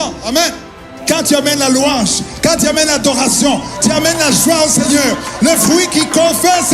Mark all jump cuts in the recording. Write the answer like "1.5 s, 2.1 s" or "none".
0.9 s